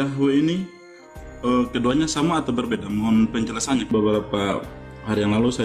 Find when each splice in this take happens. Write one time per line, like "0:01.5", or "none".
0:03.9